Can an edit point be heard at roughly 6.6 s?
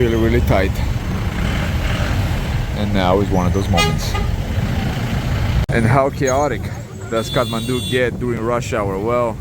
no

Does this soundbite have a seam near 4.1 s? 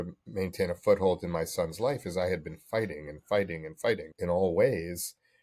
yes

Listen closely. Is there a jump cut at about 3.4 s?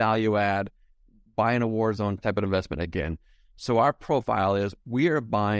no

